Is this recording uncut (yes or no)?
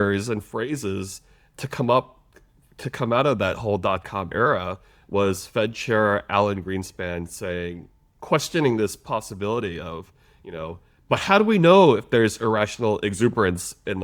yes